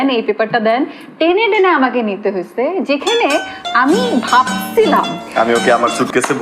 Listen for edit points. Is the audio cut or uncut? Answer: cut